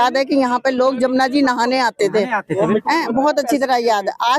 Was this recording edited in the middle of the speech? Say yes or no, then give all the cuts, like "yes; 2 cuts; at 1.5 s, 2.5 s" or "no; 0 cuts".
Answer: no; 0 cuts